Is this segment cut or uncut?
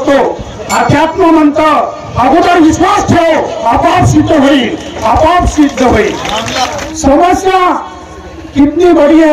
cut